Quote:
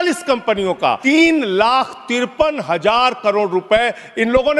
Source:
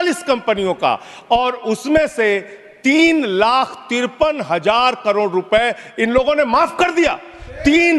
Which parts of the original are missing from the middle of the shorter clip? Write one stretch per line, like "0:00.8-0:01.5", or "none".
0:01.0-0:02.8